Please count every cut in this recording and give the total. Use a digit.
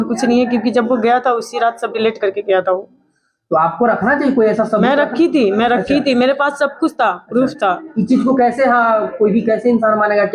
0